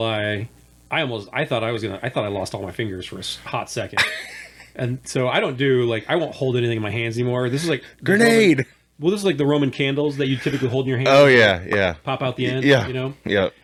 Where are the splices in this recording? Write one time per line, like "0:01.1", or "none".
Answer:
none